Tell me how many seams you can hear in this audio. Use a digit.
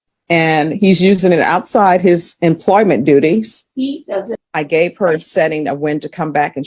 1